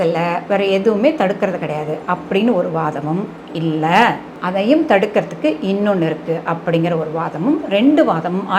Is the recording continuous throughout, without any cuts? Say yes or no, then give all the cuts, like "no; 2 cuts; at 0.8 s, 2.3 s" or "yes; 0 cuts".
yes; 0 cuts